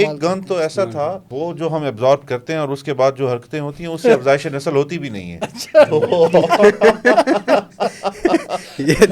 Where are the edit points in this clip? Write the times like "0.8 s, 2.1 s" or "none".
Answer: 1.3 s